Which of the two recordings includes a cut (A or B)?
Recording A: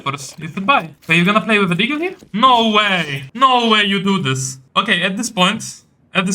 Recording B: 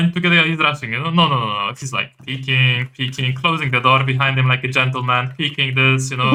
A